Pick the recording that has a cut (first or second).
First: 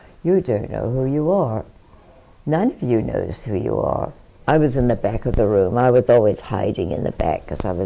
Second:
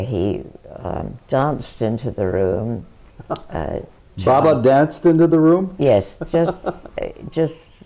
first